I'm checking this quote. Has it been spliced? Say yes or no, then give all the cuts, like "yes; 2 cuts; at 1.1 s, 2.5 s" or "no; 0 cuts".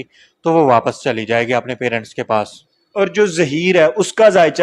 no; 0 cuts